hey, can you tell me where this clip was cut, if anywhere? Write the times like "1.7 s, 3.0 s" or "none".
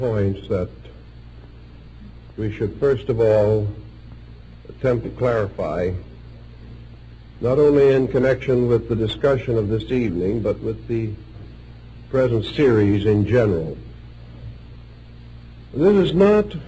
none